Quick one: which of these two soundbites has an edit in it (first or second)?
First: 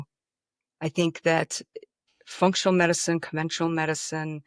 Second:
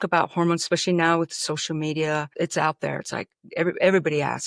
second